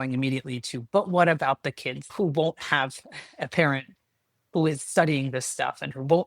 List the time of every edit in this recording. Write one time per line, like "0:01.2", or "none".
0:02.1